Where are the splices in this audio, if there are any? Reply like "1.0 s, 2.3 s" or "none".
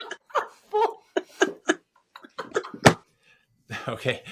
3.1 s